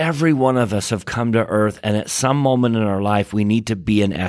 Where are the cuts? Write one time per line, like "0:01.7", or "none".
none